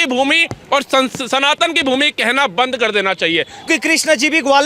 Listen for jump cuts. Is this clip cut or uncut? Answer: cut